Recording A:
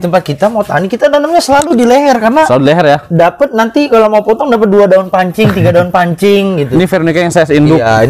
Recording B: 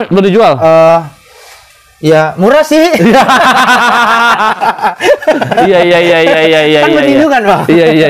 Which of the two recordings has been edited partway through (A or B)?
A